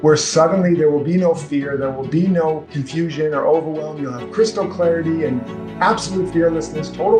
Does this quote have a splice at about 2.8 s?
yes; 1 cut; at 2.8 s

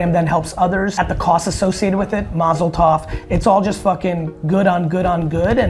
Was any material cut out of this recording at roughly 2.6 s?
no; 1 cut; at 0.9 s

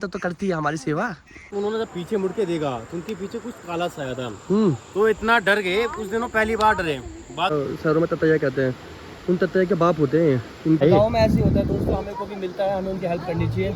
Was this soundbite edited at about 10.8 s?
yes; 3 cuts; at 1.4 s, 7.5 s, 10.8 s

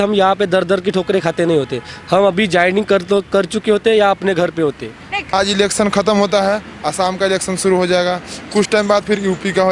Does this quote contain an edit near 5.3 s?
yes; 1 cut; at 5.3 s

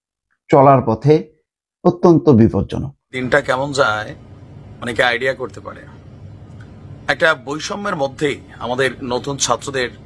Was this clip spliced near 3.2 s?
yes; 1 cut; at 3.2 s

